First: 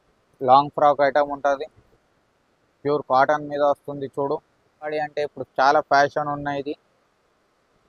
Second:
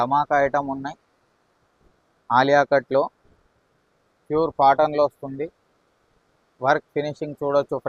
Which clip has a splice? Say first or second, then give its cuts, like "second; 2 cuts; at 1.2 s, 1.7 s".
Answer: first; 1 cut; at 4.9 s